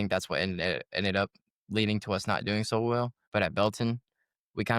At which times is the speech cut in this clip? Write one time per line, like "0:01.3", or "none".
0:03.2